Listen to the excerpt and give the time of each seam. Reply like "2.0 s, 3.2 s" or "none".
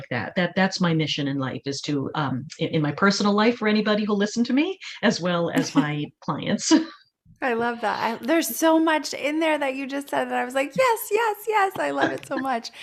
none